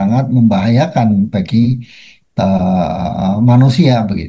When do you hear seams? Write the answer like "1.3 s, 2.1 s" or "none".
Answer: none